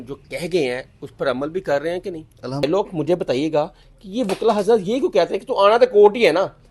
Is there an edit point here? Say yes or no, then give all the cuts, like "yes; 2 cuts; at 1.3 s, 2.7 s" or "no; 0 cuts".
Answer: yes; 1 cut; at 2.6 s